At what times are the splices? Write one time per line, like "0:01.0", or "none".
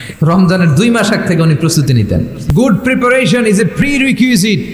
0:02.4